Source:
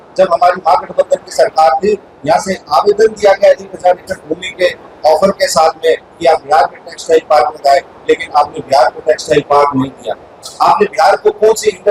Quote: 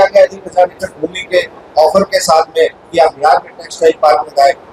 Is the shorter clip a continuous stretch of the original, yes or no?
yes